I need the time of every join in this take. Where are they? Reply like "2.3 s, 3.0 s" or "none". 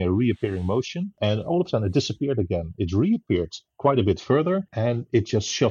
1.0 s, 4.7 s